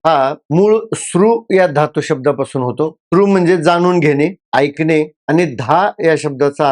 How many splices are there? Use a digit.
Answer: 1